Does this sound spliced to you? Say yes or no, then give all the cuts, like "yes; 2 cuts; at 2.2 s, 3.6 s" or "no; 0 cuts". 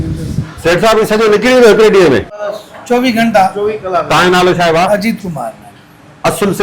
yes; 1 cut; at 2.4 s